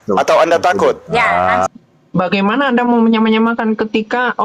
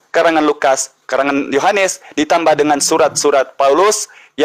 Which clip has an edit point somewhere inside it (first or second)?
first